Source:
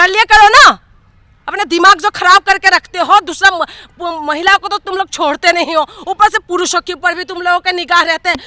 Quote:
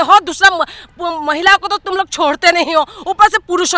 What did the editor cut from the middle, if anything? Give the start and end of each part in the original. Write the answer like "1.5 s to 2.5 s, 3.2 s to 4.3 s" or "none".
none